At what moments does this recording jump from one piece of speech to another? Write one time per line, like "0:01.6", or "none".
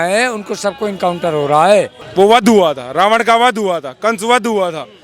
0:02.0